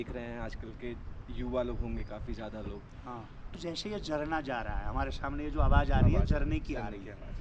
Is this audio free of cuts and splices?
no; 1 cut; at 3.5 s

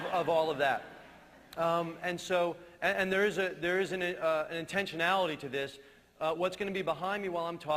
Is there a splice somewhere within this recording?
yes; 1 cut; at 1.5 s

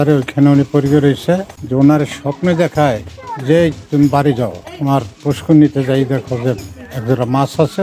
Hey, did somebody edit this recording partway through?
yes; 1 cut; at 1.5 s

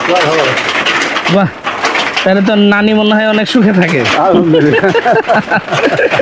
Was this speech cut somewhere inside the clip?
no; 0 cuts

